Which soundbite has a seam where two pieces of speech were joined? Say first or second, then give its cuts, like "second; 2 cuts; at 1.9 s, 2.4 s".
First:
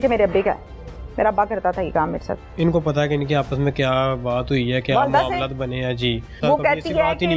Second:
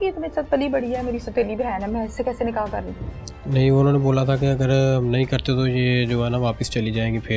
first; 2 cuts; at 2.5 s, 6.3 s